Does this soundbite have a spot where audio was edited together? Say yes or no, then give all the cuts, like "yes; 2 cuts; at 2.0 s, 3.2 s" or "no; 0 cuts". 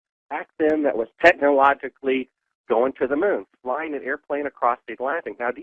yes; 1 cut; at 4.0 s